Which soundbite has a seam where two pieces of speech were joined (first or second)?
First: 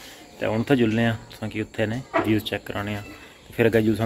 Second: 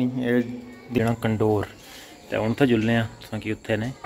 second